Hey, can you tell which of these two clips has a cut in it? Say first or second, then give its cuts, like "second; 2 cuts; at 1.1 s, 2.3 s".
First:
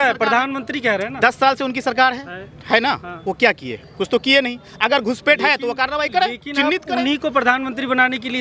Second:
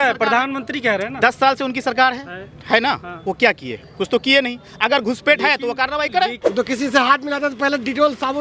second; 1 cut; at 6.4 s